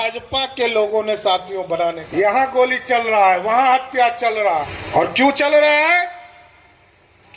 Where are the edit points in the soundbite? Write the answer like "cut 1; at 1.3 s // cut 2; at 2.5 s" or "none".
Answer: cut 1; at 2.0 s // cut 2; at 4.8 s